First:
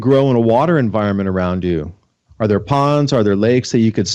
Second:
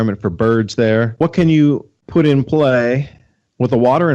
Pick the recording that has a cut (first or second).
second